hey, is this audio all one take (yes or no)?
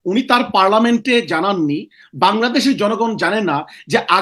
yes